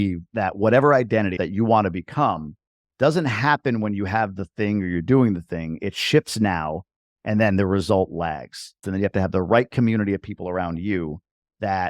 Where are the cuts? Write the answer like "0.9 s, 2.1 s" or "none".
1.3 s, 8.7 s